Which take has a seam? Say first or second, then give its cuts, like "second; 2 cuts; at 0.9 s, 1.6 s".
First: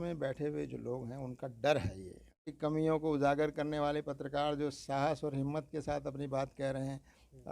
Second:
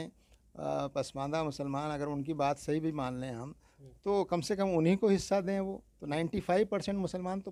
first; 1 cut; at 2.5 s